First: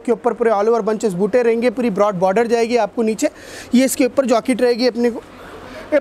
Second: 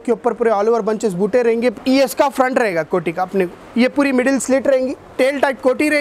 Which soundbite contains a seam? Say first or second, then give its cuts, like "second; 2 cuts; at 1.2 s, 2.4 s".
second; 2 cuts; at 1.8 s, 5.0 s